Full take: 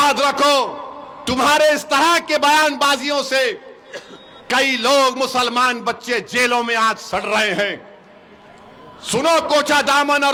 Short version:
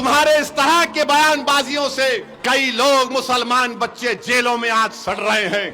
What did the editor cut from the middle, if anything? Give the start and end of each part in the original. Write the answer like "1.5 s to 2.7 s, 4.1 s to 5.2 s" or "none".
3.6 s to 4.4 s